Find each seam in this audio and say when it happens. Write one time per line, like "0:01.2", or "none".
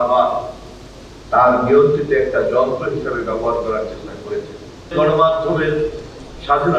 0:04.9